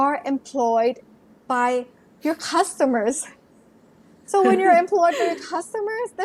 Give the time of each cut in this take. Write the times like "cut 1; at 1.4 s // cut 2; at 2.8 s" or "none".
none